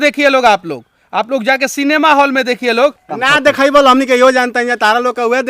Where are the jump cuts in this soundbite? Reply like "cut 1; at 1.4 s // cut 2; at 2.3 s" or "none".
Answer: cut 1; at 3.0 s